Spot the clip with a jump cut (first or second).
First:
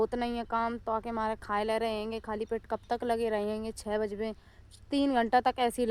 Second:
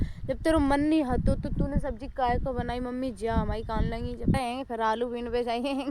second